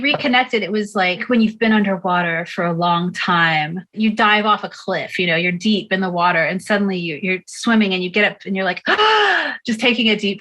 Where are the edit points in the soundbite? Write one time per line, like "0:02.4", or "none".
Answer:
0:01.2
0:03.9